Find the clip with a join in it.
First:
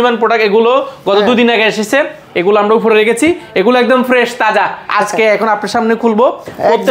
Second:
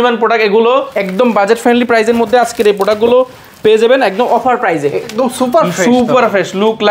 second; 2 cuts; at 0.9 s, 5.1 s

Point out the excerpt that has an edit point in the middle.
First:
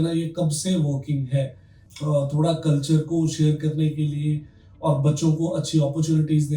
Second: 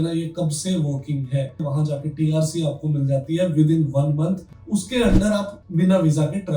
second; 3 cuts; at 1.6 s, 4.5 s, 5.6 s

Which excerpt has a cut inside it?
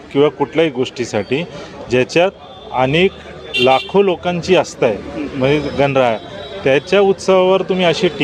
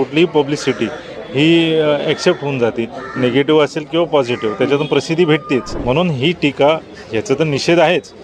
second; 1 cut; at 5.7 s

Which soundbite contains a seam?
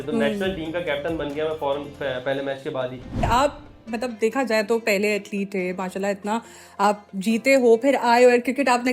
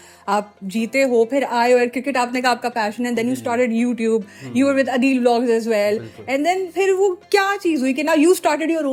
first; 1 cut; at 3.2 s

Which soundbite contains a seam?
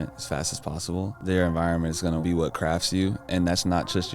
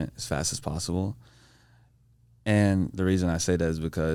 first; 2 cuts; at 1.1 s, 2.2 s

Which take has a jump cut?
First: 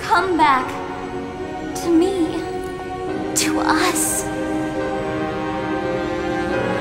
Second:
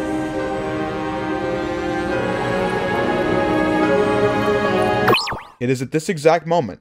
second; 1 cut; at 5.1 s

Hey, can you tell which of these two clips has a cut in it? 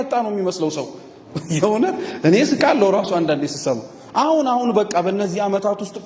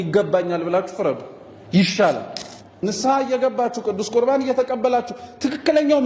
second; 1 cut; at 2.8 s

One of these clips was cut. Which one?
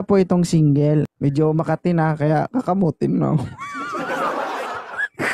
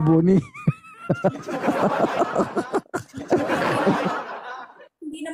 first; 1 cut; at 1.1 s

